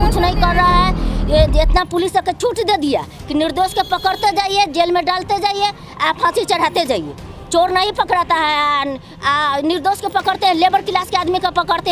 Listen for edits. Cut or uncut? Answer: uncut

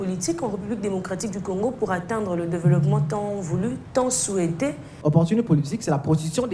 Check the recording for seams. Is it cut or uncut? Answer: cut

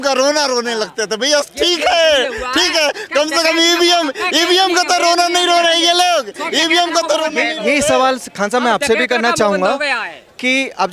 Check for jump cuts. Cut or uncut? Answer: uncut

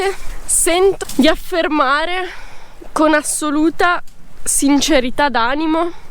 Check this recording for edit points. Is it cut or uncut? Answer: uncut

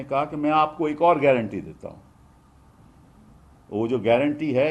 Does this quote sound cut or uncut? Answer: uncut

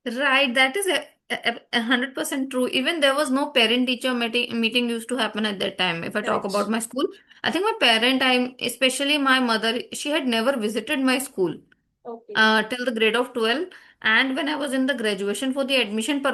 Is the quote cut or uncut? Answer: uncut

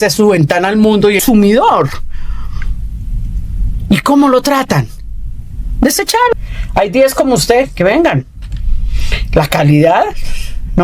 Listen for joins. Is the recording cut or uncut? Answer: cut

